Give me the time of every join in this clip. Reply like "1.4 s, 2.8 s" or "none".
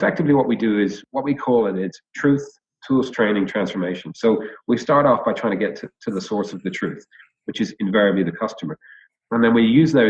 1.0 s